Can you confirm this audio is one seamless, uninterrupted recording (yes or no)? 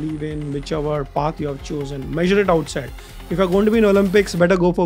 yes